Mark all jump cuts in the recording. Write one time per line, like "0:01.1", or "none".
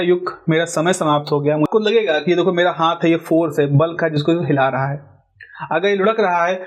0:01.7

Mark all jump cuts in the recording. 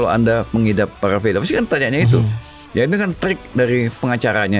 0:02.5

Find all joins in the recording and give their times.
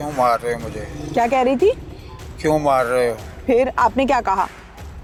none

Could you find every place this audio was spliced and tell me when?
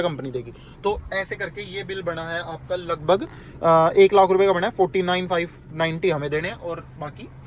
none

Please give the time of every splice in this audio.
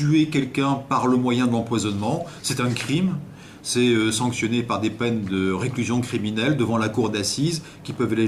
0:05.4

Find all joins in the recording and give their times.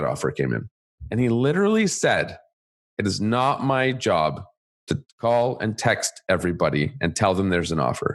0:01.0

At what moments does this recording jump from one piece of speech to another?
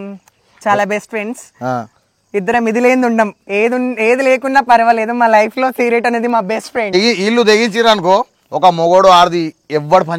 0:06.9

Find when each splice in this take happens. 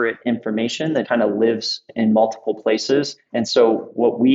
0:01.1
0:03.2

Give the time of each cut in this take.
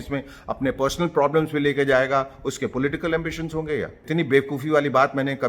0:04.1

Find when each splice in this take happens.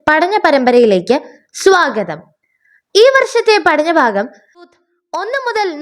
0:04.7

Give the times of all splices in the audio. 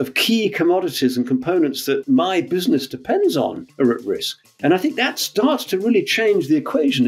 0:02.0
0:04.0

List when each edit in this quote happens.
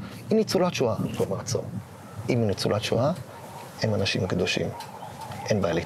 none

